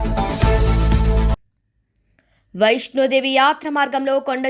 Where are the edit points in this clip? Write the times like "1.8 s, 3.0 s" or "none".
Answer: 1.6 s